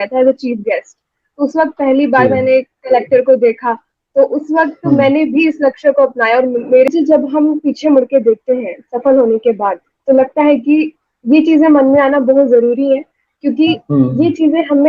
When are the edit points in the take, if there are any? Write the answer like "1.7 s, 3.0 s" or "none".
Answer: 6.9 s